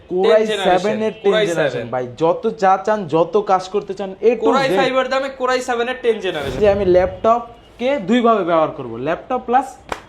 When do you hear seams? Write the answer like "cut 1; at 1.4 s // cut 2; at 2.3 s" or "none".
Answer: cut 1; at 6.6 s